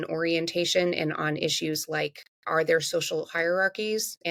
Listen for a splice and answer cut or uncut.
uncut